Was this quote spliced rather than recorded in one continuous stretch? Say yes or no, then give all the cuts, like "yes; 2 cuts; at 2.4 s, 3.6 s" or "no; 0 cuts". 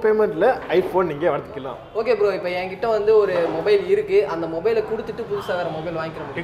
yes; 1 cut; at 1.8 s